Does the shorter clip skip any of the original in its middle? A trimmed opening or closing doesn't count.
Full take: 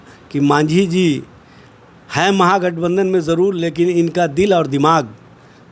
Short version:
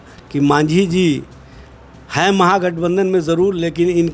no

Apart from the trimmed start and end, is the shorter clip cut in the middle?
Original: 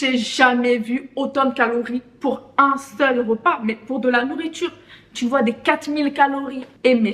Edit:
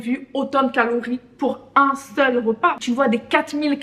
yes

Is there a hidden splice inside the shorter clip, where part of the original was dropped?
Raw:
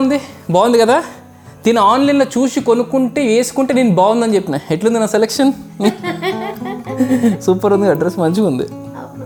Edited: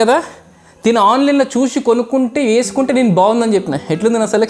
no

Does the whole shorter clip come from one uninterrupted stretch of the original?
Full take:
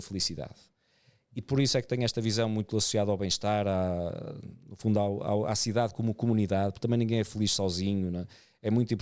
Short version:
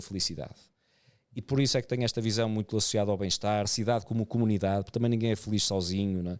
no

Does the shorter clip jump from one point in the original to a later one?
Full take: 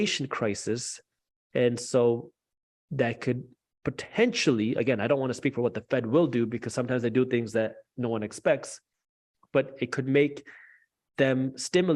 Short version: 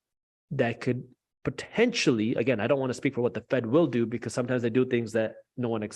no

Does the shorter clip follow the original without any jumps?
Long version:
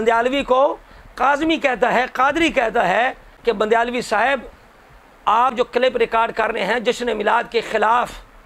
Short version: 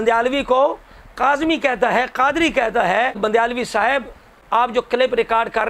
no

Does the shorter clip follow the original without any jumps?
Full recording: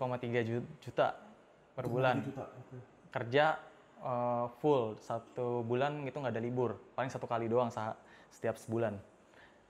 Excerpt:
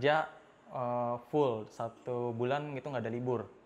yes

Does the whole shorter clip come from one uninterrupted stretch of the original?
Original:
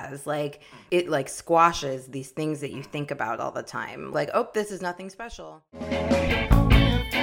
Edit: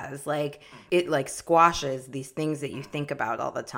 yes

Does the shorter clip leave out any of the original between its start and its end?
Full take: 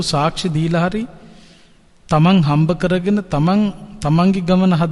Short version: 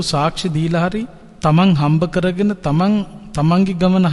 yes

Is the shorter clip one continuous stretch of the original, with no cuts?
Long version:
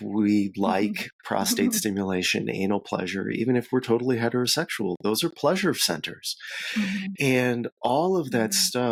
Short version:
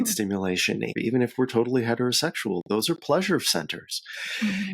no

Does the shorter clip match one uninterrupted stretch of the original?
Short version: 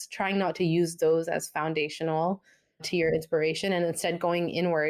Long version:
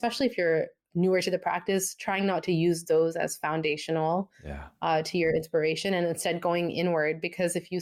no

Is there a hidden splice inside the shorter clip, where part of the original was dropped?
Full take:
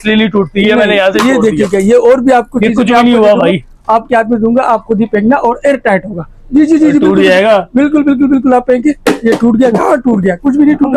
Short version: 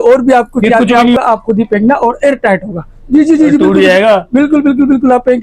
yes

